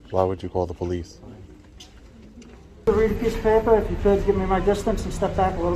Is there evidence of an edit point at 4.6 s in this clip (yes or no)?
no